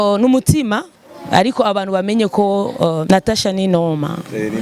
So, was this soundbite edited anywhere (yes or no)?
yes